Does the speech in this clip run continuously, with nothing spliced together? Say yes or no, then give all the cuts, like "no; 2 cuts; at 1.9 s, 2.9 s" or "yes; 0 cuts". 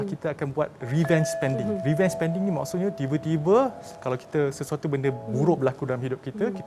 yes; 0 cuts